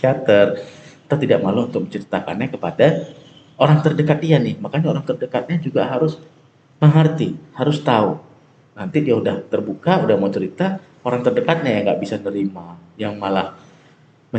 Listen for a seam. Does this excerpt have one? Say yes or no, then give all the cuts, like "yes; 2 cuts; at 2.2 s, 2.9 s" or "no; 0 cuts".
no; 0 cuts